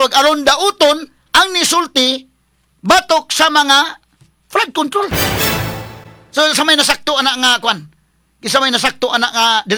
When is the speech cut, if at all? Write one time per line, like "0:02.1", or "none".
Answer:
none